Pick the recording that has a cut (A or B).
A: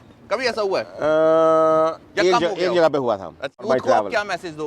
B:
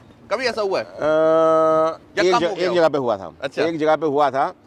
A